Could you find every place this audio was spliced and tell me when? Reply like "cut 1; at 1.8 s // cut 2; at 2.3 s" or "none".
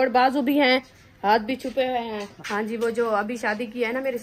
cut 1; at 2.3 s